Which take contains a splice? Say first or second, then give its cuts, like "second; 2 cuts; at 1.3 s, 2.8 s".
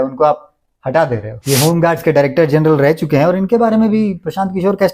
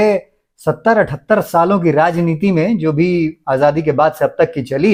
first; 1 cut; at 1.4 s